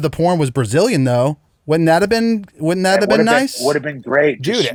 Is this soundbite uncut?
yes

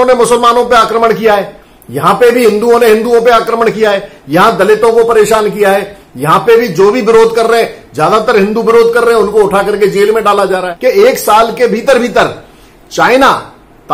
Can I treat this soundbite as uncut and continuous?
no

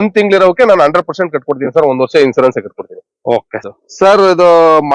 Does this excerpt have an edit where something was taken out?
yes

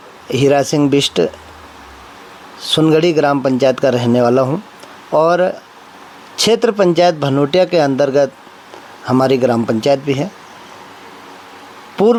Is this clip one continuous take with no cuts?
yes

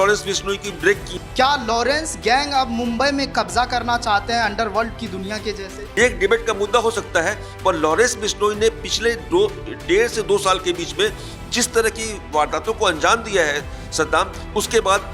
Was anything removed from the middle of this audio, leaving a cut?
yes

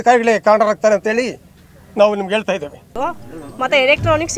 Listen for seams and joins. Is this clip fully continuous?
yes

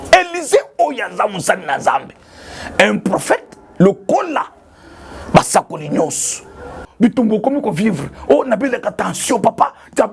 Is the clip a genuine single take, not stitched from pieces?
no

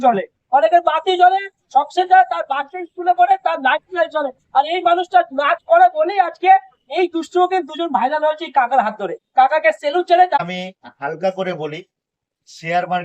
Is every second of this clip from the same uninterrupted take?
no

